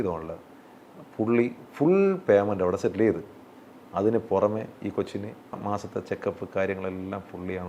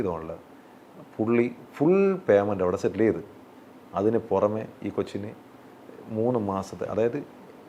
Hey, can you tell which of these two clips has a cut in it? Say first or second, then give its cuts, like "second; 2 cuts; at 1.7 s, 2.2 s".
first; 1 cut; at 5.6 s